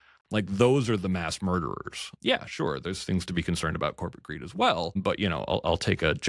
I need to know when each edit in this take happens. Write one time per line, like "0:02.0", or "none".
0:02.1
0:05.0

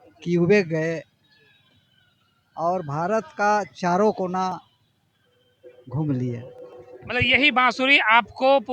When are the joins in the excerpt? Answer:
none

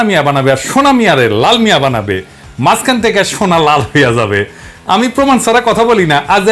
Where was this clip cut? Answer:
none

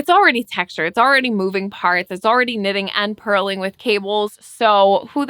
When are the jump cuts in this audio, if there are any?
none

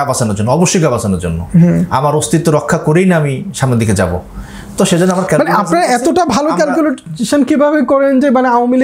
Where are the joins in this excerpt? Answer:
none

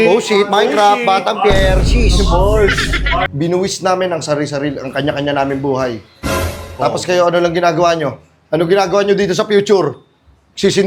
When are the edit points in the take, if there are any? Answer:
0:03.3

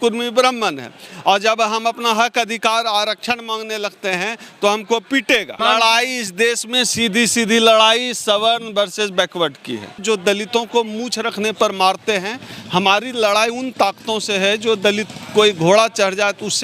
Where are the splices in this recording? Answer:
0:05.5
0:10.0

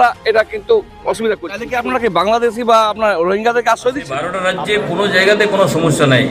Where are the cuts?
0:01.6
0:04.4

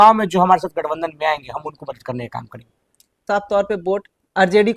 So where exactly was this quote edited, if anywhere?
0:03.2

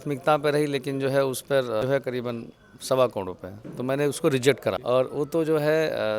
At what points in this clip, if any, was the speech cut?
0:01.5
0:04.8

